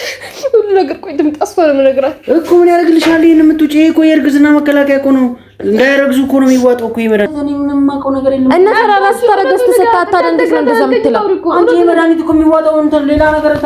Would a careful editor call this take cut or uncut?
cut